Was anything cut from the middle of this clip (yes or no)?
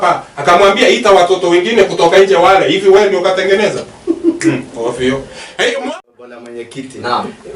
yes